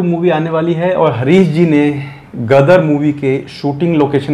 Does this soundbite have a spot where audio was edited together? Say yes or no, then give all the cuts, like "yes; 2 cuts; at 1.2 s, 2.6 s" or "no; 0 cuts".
no; 0 cuts